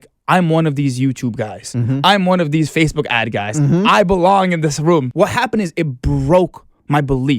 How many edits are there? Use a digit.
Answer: 1